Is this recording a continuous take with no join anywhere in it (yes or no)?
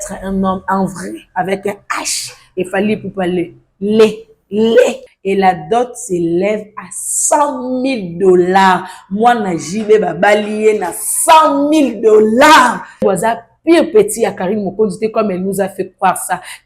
no